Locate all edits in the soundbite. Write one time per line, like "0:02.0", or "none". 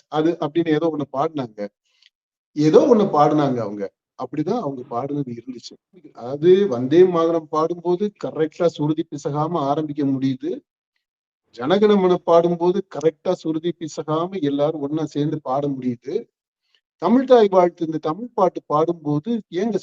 0:06.2